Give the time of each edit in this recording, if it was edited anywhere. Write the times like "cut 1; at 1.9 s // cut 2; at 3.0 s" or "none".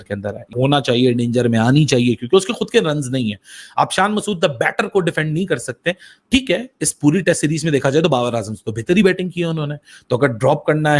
none